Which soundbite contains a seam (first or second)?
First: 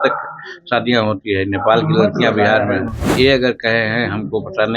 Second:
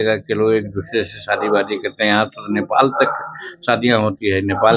first